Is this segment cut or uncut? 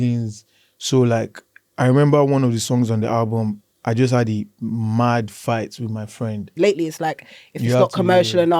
cut